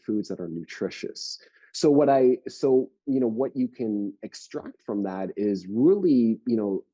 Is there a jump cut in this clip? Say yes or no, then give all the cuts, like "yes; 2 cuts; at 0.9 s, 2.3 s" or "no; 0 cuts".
no; 0 cuts